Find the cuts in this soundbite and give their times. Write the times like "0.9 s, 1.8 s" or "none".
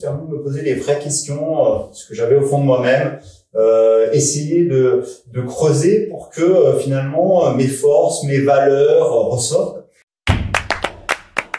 10.1 s